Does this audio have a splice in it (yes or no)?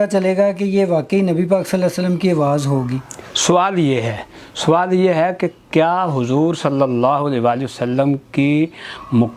no